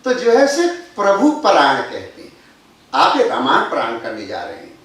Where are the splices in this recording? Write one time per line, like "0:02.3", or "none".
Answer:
0:03.5